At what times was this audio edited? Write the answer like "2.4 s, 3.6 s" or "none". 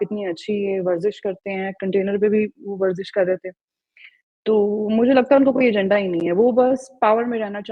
none